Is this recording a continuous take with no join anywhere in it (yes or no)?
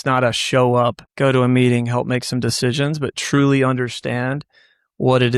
no